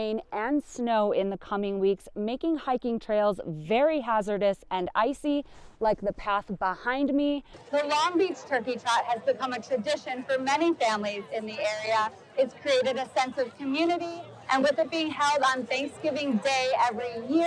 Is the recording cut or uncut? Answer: cut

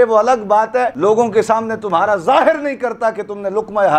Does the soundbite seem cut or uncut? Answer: cut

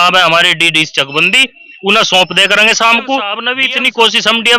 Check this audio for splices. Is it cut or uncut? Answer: cut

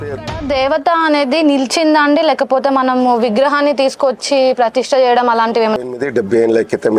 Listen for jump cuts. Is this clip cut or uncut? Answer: cut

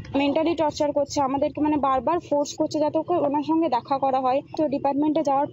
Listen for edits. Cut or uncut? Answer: cut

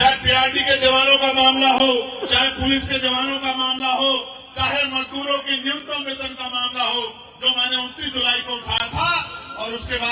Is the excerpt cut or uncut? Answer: uncut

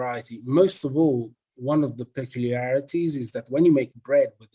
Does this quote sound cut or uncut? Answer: uncut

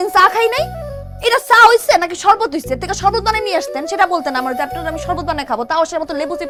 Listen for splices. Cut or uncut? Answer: uncut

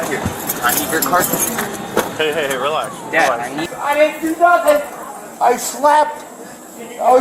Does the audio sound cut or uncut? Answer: cut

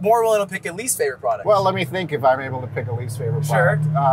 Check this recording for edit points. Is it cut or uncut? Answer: uncut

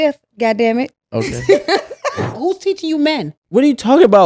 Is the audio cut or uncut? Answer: cut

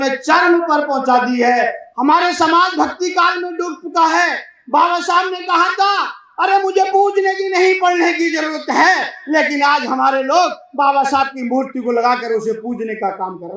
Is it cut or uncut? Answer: cut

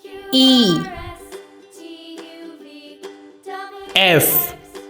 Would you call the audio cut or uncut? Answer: cut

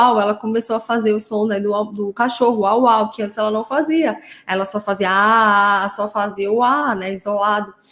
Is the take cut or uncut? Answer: uncut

